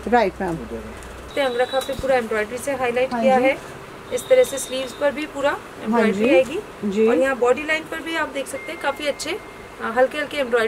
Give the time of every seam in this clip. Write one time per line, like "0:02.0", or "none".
0:01.3